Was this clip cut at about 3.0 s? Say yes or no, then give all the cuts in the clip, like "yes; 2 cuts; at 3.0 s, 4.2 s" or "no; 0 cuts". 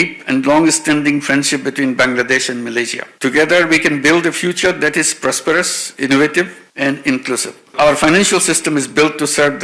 yes; 2 cuts; at 3.0 s, 7.7 s